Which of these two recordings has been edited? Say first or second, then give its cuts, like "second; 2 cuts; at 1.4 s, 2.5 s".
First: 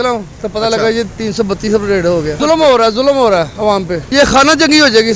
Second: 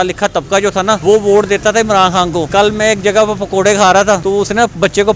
second; 3 cuts; at 1.0 s, 2.5 s, 4.2 s